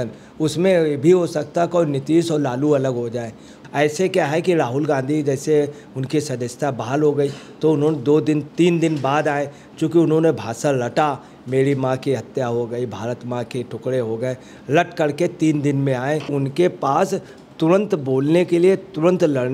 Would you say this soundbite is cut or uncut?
cut